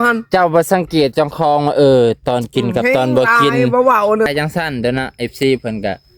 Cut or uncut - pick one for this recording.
cut